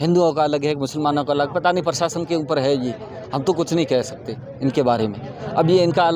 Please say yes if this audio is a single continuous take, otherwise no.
yes